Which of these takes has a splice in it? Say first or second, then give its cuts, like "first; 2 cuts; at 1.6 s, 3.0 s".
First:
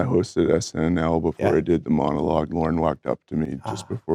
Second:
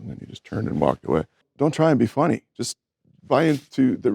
second; 1 cut; at 1.4 s